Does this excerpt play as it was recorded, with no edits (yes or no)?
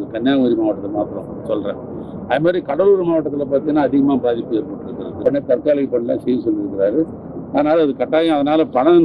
no